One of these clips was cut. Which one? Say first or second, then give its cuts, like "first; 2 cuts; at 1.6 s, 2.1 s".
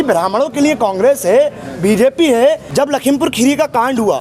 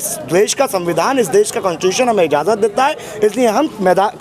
first; 1 cut; at 2.6 s